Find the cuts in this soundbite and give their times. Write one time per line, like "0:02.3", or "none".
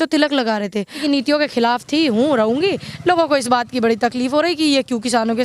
0:01.0